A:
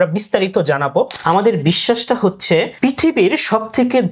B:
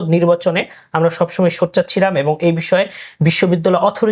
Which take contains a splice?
A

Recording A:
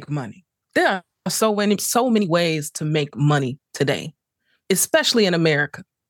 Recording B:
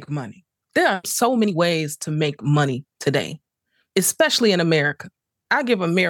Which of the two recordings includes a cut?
B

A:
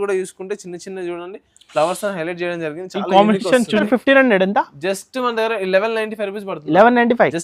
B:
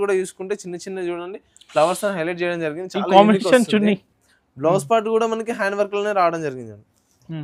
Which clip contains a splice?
A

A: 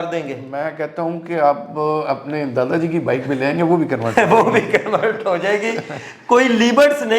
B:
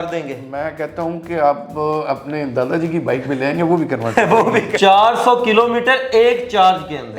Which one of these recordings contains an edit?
B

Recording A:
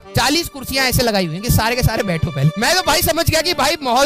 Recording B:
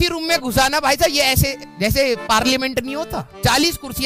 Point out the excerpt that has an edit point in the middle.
A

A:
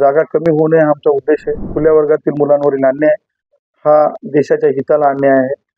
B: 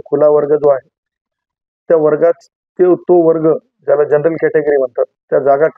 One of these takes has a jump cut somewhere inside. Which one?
A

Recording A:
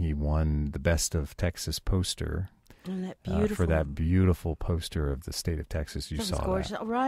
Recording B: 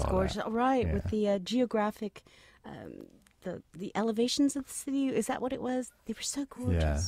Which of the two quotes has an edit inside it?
B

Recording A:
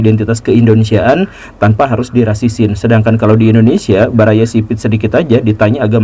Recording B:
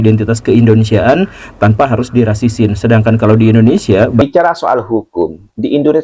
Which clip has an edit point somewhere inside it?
B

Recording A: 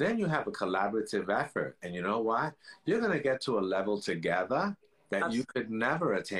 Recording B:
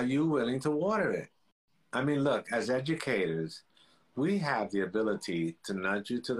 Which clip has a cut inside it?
B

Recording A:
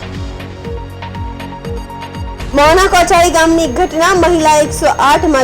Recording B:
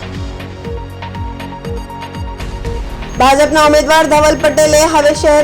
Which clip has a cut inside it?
A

